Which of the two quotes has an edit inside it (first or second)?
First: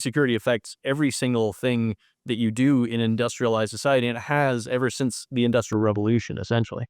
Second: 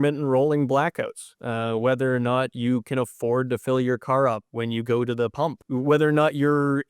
second